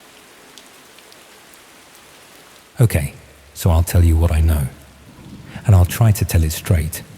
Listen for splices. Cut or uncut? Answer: cut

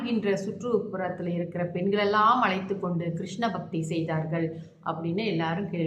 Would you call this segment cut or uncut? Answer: uncut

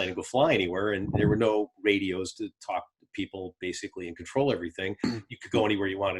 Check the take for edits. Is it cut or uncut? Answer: uncut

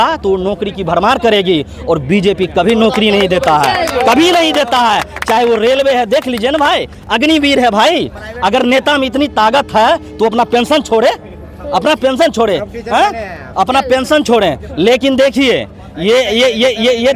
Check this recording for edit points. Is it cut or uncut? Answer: uncut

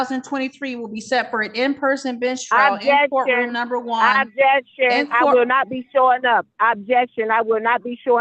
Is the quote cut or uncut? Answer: uncut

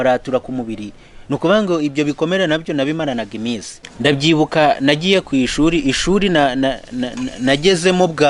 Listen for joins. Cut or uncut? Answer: cut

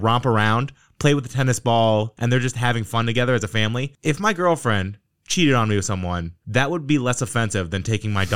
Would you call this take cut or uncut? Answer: cut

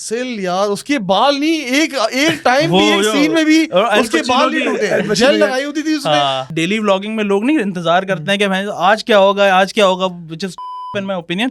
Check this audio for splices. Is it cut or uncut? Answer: cut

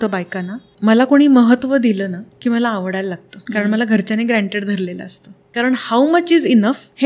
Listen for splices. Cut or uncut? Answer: cut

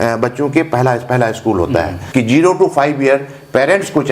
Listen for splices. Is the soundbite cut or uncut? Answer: cut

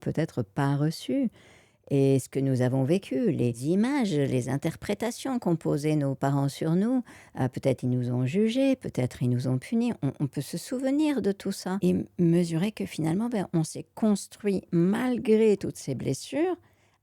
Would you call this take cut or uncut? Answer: cut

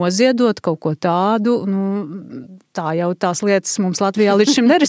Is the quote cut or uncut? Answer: uncut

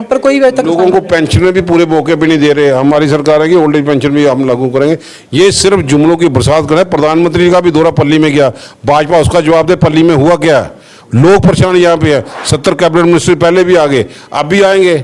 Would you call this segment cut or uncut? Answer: uncut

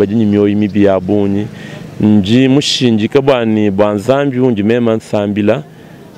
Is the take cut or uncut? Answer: uncut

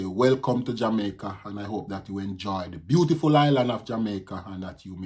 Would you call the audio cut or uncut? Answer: uncut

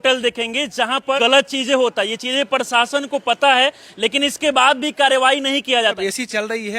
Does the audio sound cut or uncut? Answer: cut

